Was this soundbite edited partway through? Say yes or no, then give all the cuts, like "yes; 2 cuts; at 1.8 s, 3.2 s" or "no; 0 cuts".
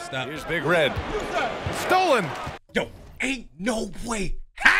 no; 0 cuts